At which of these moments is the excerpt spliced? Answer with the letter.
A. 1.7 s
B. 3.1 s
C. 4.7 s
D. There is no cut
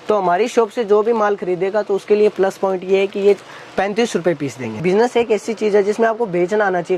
C